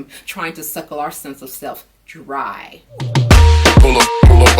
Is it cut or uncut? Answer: cut